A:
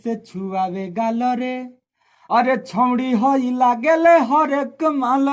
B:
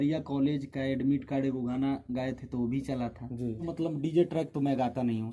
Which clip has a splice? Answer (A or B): B